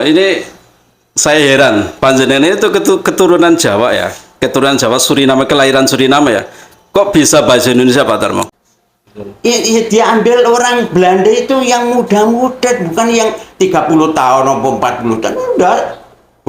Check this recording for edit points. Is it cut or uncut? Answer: cut